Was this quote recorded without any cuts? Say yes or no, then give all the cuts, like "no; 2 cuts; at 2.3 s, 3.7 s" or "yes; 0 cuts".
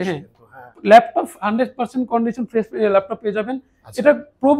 yes; 0 cuts